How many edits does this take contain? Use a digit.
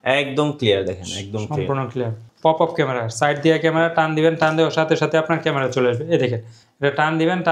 1